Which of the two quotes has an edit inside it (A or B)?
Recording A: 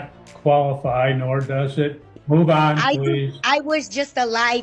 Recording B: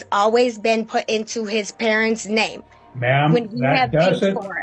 A